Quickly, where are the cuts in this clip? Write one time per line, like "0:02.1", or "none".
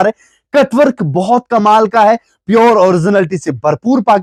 none